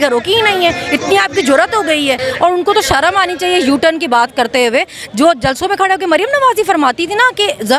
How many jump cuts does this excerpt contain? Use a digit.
1